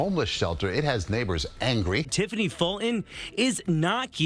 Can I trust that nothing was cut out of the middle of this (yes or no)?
no